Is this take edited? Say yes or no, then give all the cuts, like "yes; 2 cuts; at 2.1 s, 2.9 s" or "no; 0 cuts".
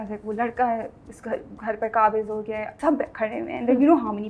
yes; 1 cut; at 2.7 s